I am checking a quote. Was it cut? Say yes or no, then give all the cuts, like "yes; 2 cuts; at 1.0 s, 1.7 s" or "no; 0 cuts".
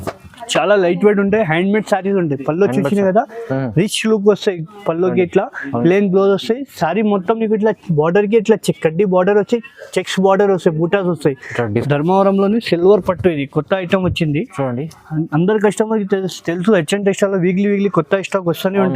yes; 1 cut; at 11.8 s